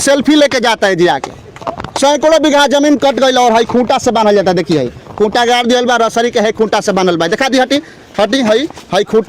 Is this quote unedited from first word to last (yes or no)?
yes